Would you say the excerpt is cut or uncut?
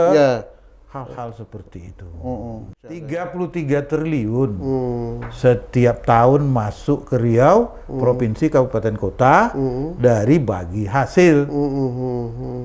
cut